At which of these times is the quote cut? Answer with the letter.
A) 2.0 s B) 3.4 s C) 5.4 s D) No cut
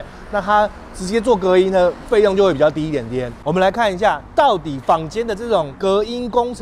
B